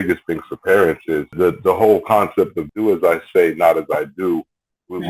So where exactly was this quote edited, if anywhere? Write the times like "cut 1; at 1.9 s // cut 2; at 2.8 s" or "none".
cut 1; at 1.3 s // cut 2; at 2.6 s